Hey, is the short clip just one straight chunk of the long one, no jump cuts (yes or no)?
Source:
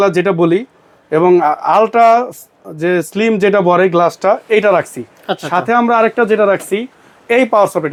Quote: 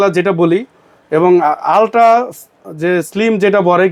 yes